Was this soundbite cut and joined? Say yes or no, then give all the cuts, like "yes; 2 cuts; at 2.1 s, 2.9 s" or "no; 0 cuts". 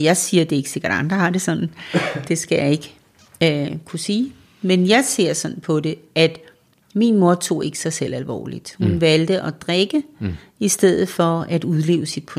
no; 0 cuts